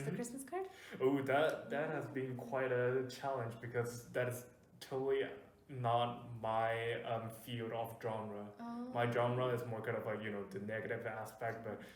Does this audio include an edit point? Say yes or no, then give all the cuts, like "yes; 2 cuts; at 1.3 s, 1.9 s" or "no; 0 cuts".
no; 0 cuts